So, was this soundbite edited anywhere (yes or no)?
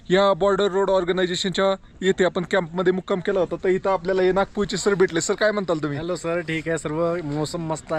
no